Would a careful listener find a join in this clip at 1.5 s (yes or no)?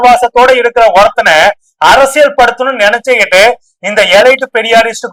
no